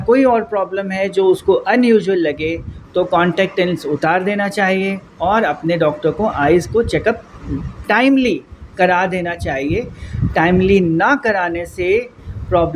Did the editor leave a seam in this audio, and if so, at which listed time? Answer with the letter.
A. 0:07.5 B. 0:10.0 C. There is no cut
C